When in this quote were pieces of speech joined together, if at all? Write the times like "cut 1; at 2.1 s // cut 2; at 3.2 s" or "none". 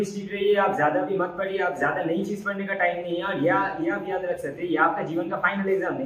none